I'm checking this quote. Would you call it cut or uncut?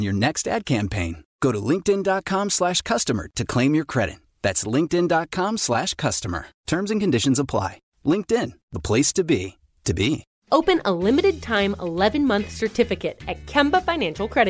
cut